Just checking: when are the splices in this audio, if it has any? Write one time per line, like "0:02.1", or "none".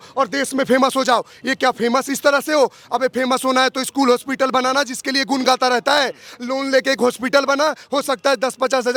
none